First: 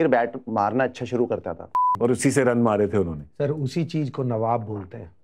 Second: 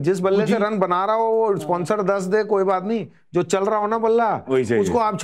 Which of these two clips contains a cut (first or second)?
first